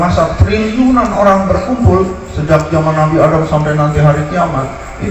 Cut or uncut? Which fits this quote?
uncut